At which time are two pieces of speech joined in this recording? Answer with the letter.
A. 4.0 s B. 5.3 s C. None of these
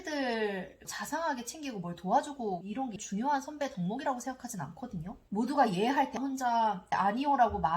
B